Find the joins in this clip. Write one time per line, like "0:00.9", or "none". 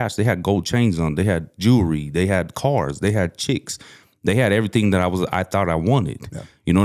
none